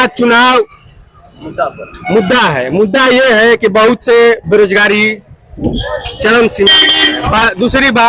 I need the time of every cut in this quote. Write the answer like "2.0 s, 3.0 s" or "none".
none